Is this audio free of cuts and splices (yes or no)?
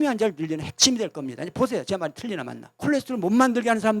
no